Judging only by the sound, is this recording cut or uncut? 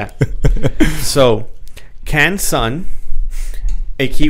uncut